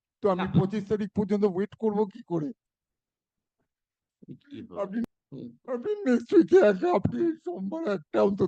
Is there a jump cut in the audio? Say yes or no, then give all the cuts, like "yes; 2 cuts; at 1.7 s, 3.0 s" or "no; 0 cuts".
yes; 1 cut; at 5.0 s